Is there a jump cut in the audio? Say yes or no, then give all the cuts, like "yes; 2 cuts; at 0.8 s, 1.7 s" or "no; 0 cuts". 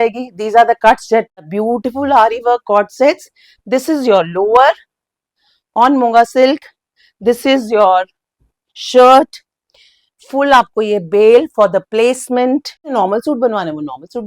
yes; 2 cuts; at 1.5 s, 12.9 s